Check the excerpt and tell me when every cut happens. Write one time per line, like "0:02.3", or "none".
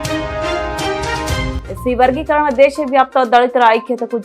none